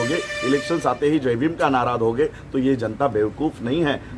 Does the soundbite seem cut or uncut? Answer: uncut